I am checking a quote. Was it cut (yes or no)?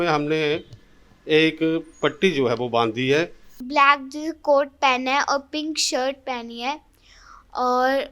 yes